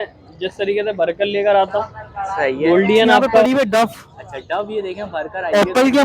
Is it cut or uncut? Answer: cut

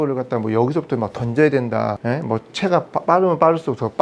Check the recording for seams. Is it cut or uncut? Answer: cut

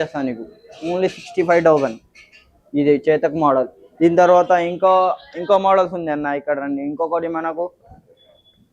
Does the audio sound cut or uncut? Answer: uncut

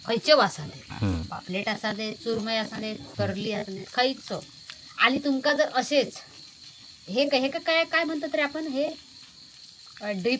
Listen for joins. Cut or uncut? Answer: cut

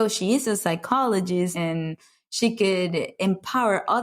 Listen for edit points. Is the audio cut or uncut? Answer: cut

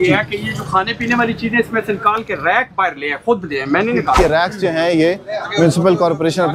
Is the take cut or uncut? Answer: cut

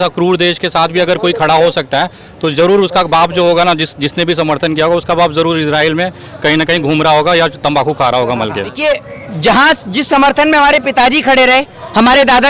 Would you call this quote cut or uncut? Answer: cut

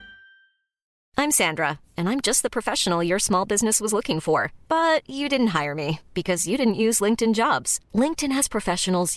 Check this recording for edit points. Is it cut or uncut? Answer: cut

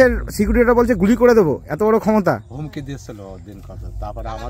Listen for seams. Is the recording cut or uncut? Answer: uncut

